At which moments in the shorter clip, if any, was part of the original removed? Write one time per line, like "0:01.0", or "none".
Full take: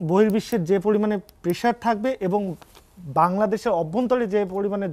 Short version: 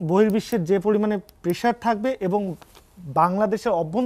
none